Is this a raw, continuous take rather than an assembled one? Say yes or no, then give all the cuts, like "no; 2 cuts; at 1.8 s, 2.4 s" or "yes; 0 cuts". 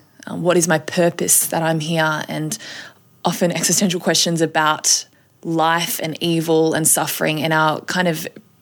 yes; 0 cuts